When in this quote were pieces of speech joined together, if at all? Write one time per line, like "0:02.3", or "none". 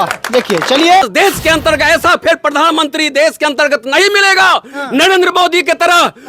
0:01.0